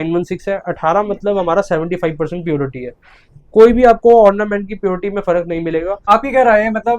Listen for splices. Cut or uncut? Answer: cut